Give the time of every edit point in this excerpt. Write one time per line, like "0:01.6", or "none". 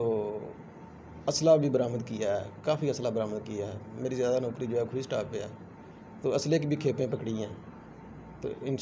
none